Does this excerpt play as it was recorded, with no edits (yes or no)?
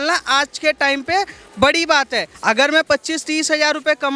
no